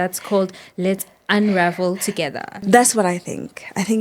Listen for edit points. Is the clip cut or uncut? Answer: cut